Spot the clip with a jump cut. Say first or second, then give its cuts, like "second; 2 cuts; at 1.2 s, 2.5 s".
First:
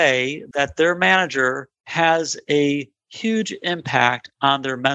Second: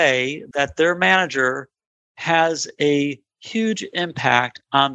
first; 1 cut; at 1.8 s